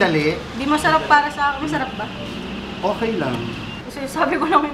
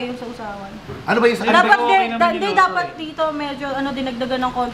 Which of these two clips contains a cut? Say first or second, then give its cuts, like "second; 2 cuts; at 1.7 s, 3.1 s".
first; 1 cut; at 3.8 s